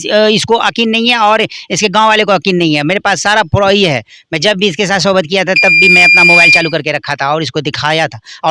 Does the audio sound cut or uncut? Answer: uncut